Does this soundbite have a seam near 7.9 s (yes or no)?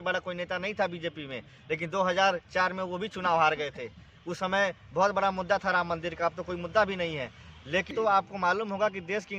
yes